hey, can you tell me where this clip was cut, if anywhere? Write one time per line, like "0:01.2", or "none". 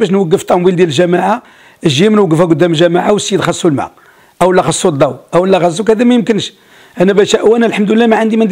none